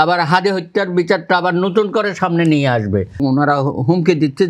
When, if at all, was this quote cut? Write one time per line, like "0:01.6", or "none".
0:03.2